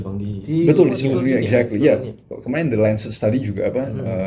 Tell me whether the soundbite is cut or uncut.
uncut